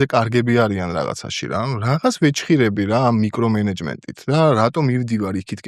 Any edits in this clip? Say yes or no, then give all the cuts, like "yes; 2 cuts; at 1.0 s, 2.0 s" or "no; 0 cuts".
no; 0 cuts